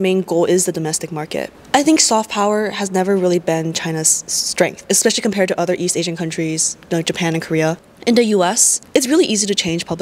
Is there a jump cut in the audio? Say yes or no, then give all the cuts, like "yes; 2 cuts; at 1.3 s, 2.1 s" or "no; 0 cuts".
yes; 3 cuts; at 1.4 s, 7.9 s, 8.7 s